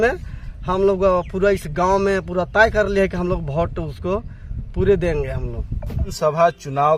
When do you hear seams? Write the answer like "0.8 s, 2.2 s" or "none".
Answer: none

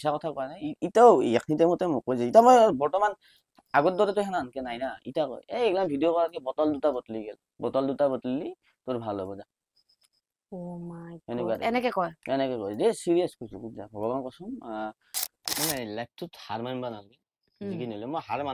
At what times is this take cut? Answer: 15.4 s

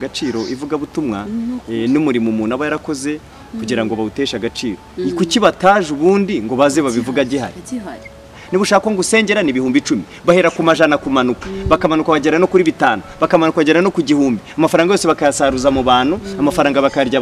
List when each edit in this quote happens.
8.3 s

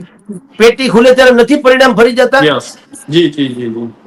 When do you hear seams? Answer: none

